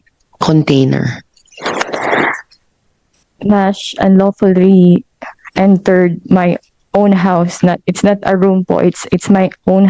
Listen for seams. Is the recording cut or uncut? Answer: uncut